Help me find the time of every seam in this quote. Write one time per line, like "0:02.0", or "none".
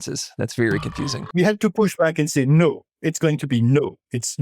0:01.2